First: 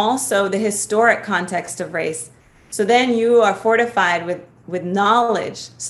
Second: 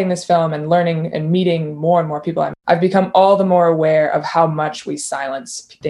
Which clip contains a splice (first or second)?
second